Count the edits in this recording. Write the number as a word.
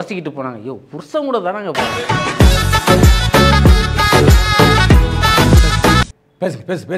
two